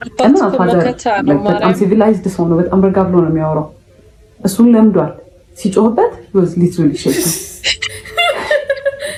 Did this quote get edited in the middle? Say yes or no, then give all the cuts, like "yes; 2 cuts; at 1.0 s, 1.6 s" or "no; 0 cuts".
no; 0 cuts